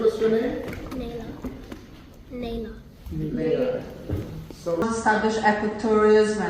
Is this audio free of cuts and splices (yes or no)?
no